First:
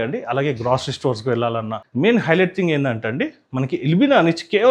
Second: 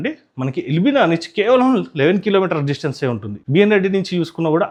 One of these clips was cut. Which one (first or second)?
first